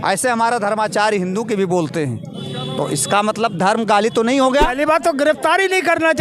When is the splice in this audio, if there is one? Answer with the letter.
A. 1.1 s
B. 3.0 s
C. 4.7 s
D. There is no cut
C